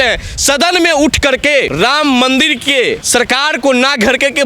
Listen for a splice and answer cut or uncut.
cut